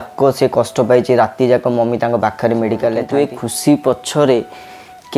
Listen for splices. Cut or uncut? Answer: cut